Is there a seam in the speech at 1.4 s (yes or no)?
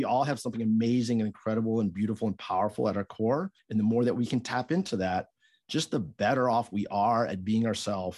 no